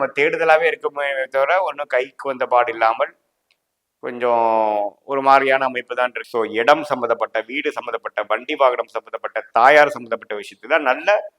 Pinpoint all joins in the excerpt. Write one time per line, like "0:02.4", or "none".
0:06.2